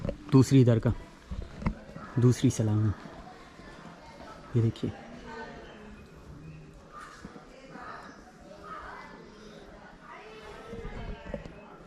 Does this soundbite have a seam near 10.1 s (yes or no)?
no